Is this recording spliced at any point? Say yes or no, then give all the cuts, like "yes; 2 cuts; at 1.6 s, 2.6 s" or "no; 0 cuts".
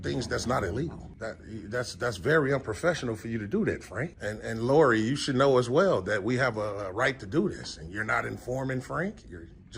yes; 2 cuts; at 1.1 s, 4.2 s